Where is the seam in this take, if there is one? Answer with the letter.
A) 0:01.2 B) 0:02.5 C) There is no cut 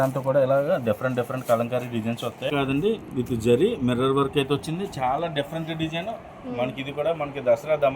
B